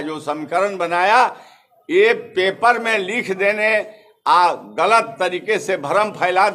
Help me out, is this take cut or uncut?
uncut